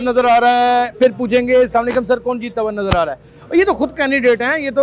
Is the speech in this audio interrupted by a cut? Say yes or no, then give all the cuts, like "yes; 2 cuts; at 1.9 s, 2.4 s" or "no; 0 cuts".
no; 0 cuts